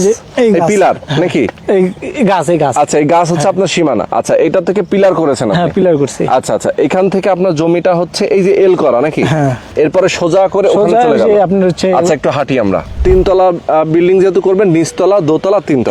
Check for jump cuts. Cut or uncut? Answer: cut